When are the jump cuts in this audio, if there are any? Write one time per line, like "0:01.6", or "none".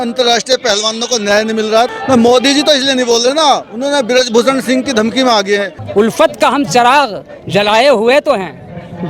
0:02.0
0:05.8